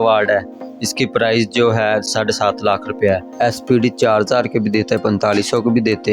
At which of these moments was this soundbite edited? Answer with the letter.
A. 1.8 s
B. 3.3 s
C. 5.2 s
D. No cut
B